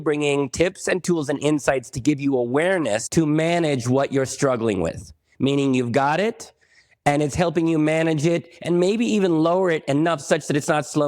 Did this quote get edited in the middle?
yes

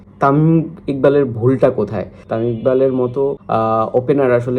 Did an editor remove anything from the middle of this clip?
yes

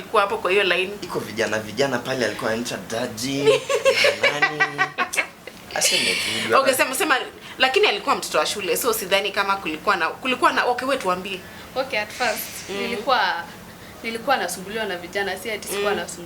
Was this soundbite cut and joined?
no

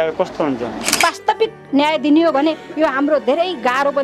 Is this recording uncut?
no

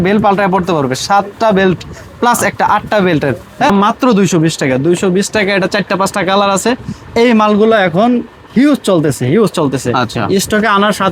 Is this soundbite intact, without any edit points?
no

